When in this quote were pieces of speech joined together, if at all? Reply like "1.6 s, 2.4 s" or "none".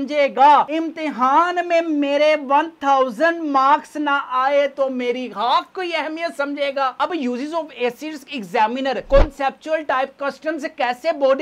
6.9 s